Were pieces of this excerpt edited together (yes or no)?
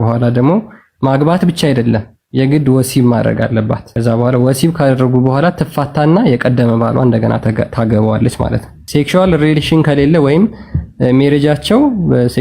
yes